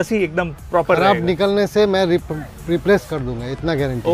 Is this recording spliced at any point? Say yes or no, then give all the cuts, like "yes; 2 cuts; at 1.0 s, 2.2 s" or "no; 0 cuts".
no; 0 cuts